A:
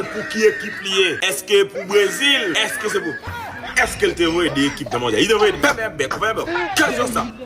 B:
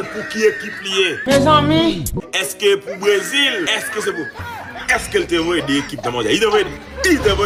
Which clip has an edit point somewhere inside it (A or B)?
A